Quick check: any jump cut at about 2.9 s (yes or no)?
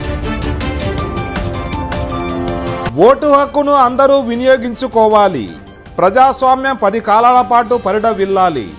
yes